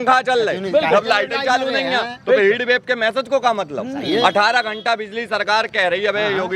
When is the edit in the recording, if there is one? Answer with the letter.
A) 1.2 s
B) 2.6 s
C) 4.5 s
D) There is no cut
D